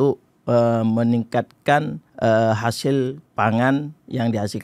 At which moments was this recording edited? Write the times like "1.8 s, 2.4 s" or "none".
2.0 s, 3.2 s

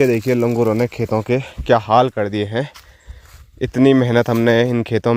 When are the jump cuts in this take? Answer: none

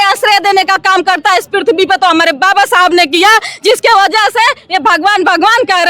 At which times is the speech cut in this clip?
none

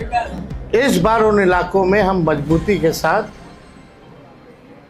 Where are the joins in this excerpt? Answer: none

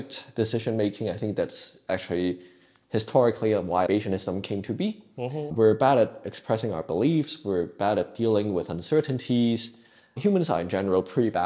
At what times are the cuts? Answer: 3.9 s, 10.1 s

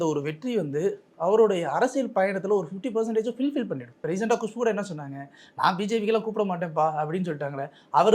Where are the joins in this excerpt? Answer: 3.9 s

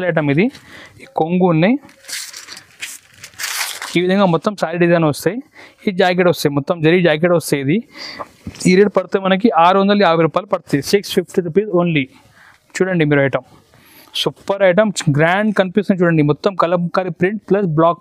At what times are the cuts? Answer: none

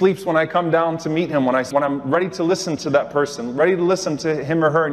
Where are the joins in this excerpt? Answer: 1.7 s

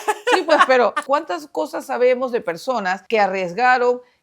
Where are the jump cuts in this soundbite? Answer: 1.0 s, 3.0 s

